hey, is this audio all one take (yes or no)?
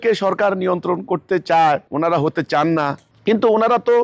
no